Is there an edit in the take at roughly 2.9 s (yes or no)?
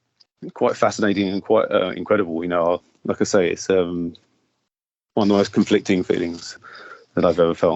yes